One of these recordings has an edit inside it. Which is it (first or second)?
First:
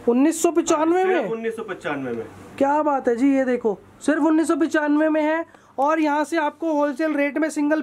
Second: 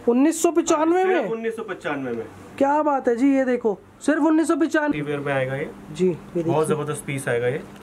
second